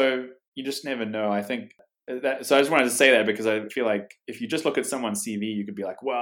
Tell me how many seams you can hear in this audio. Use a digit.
1